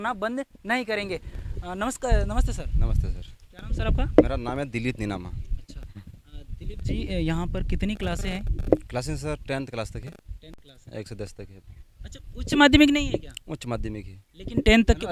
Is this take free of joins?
yes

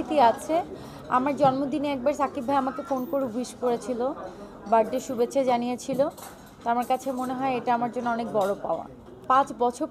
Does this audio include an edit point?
no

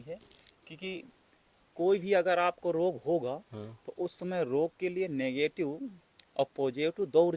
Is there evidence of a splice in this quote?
no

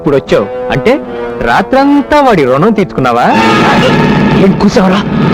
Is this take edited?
no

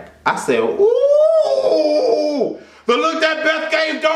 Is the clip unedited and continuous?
yes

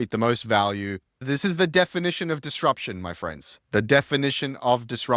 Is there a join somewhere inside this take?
no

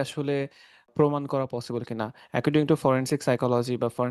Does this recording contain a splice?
yes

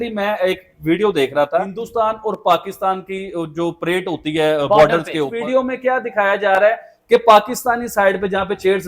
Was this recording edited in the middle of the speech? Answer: yes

